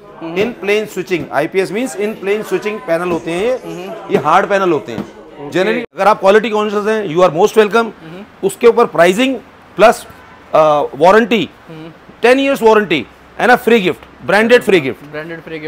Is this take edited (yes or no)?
yes